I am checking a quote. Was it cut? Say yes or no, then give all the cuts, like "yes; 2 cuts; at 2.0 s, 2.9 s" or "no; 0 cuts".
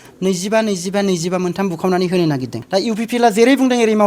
yes; 1 cut; at 2.5 s